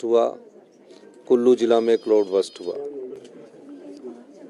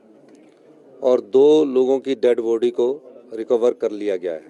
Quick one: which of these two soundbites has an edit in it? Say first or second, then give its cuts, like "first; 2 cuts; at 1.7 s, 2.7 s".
first; 1 cut; at 3.2 s